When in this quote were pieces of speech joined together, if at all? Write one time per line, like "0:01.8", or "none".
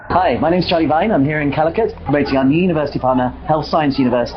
none